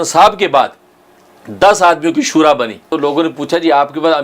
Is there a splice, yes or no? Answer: yes